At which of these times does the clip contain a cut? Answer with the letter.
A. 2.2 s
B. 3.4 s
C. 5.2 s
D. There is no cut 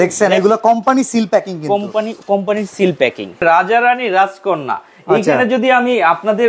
B